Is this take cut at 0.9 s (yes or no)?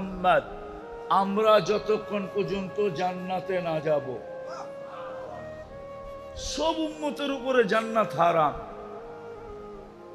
no